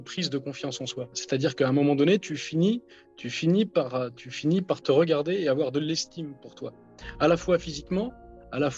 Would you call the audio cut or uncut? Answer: uncut